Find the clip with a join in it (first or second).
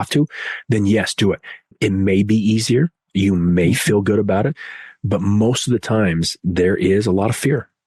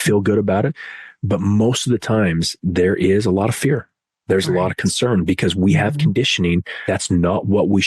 second